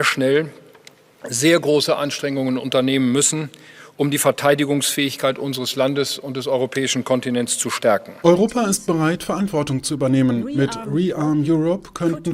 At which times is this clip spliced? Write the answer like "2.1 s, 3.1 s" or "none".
8.1 s